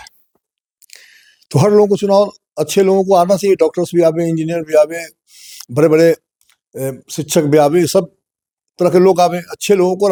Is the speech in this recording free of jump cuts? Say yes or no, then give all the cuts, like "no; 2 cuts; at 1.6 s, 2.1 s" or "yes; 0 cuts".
yes; 0 cuts